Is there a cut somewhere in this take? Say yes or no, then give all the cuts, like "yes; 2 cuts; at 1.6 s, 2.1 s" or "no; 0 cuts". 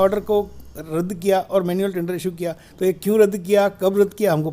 no; 0 cuts